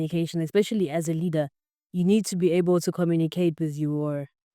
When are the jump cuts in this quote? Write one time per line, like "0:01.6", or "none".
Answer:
none